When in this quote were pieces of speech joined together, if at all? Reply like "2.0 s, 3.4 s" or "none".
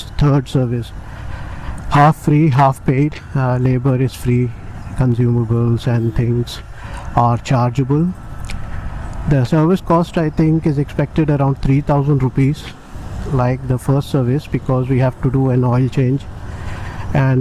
none